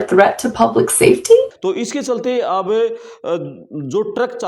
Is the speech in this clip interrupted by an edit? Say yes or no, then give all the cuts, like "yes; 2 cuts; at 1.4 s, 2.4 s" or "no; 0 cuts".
no; 0 cuts